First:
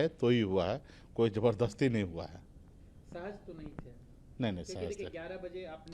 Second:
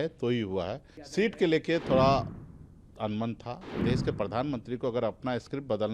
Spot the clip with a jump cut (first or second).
second